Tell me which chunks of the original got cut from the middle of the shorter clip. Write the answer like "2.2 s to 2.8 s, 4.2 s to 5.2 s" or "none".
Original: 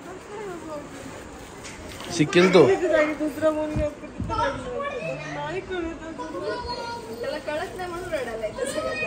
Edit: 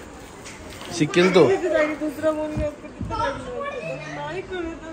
none